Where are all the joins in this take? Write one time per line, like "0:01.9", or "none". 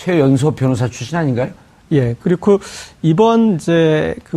0:03.0

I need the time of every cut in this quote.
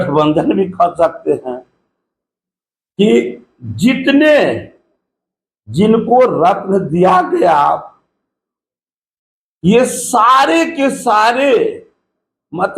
none

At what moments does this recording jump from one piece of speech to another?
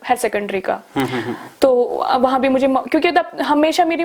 none

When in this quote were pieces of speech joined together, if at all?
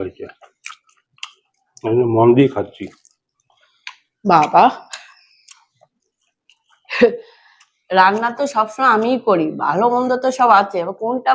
none

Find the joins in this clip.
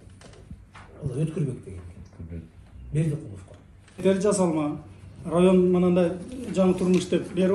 0:04.0

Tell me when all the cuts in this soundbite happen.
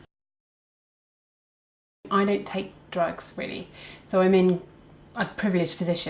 0:02.5

